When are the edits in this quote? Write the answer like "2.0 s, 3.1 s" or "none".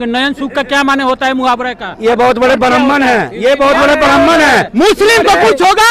4.7 s